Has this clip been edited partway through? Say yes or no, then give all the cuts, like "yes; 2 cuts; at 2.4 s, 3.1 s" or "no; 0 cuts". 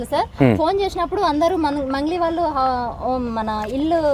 no; 0 cuts